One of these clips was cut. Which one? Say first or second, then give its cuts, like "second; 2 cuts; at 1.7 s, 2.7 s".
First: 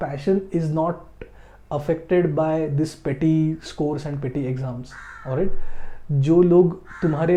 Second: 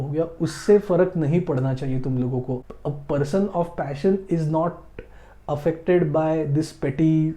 second; 1 cut; at 2.6 s